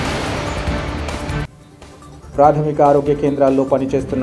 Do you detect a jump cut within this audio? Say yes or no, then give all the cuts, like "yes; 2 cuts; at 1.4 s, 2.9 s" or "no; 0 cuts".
yes; 1 cut; at 1.3 s